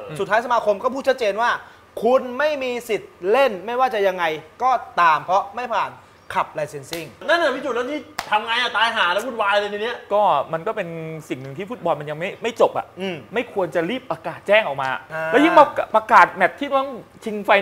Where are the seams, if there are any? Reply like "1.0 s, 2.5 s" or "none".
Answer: 7.1 s, 15.1 s